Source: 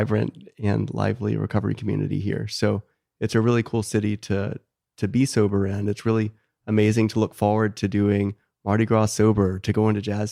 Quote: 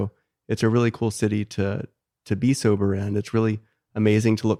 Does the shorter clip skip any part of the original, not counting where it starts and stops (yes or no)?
no